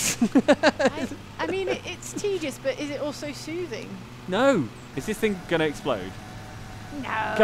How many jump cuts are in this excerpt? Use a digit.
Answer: 1